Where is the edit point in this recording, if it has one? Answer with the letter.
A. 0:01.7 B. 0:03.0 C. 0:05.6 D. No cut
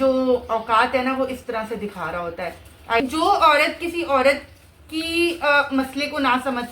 B